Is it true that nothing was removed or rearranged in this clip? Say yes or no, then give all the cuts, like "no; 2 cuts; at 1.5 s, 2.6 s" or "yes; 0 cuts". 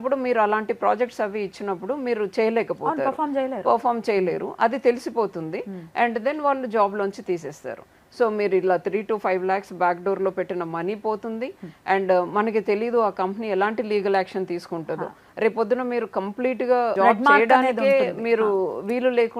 yes; 0 cuts